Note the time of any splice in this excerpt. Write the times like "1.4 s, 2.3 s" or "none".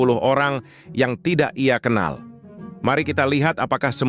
none